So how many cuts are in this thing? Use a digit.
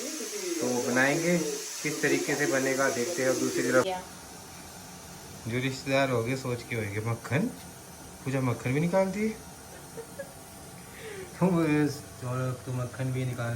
2